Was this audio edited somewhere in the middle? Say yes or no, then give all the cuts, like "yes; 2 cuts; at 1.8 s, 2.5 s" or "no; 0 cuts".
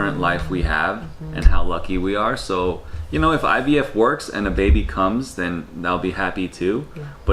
no; 0 cuts